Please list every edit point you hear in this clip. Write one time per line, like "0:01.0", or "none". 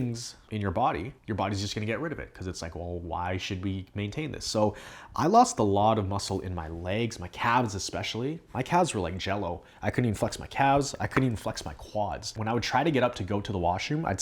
0:12.3